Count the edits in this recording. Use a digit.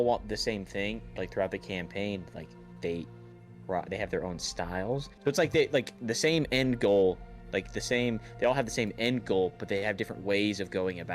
2